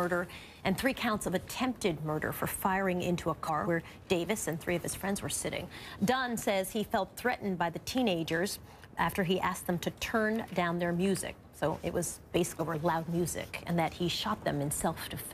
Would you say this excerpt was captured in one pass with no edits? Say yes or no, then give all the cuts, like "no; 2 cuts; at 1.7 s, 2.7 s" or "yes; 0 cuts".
yes; 0 cuts